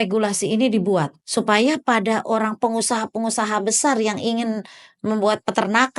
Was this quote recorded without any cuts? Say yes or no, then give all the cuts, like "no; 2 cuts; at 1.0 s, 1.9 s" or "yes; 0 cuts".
no; 1 cut; at 1.2 s